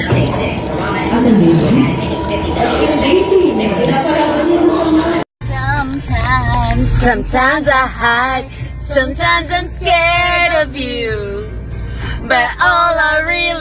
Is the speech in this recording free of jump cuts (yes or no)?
no